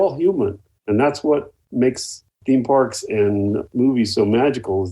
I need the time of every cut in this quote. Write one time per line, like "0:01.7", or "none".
0:01.8